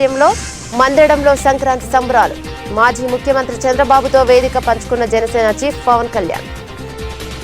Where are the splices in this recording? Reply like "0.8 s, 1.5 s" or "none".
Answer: 6.4 s